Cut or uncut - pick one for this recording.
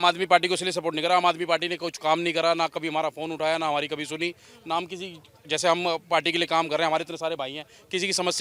uncut